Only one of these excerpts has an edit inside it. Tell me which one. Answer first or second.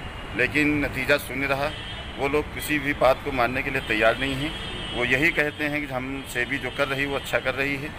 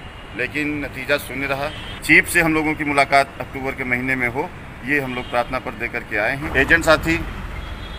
second